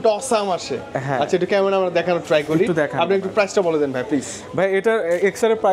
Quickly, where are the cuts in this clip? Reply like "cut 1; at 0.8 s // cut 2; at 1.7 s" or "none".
none